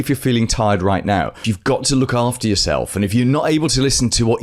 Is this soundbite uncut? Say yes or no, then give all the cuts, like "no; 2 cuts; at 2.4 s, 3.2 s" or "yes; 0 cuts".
no; 1 cut; at 1.5 s